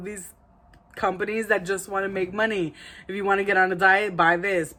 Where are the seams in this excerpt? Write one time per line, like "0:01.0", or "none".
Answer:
none